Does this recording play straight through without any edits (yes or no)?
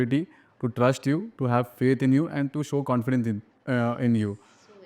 yes